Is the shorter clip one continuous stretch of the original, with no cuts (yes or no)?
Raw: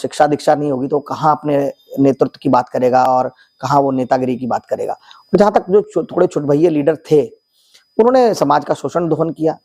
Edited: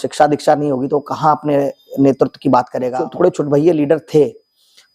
no